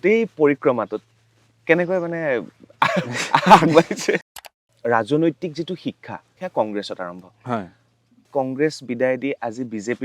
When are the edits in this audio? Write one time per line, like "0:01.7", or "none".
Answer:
0:04.4
0:06.3
0:08.3